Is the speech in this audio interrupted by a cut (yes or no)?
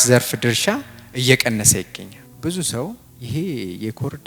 yes